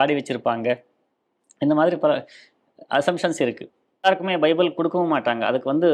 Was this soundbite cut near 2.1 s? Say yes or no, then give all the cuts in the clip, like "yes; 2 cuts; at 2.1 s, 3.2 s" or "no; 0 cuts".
no; 1 cut; at 4.0 s